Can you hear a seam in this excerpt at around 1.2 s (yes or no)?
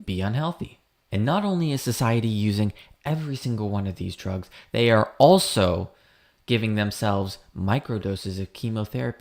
yes